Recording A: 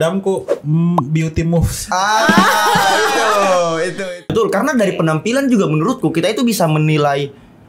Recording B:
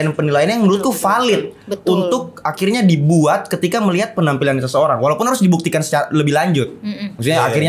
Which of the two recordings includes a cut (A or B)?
A